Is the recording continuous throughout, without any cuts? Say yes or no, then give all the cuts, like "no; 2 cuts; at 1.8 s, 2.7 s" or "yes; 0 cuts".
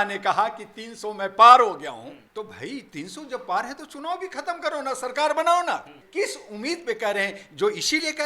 no; 1 cut; at 2.2 s